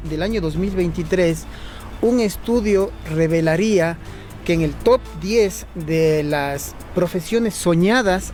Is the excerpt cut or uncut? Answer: uncut